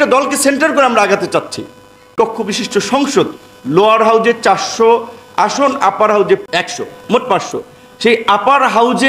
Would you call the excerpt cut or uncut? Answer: cut